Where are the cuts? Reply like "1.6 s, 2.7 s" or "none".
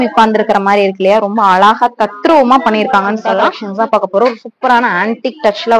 3.6 s